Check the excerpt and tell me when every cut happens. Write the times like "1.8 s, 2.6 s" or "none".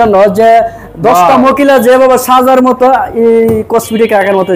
none